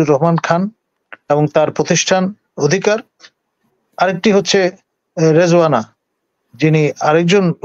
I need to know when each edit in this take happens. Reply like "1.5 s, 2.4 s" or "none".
none